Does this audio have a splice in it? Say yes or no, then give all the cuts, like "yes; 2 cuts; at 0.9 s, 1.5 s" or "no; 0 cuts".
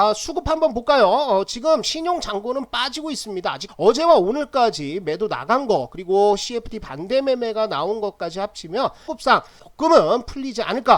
yes; 2 cuts; at 3.6 s, 9.1 s